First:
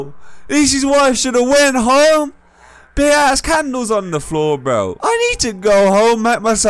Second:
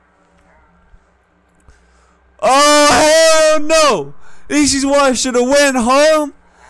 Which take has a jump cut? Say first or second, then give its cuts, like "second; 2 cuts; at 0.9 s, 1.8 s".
first; 1 cut; at 4.9 s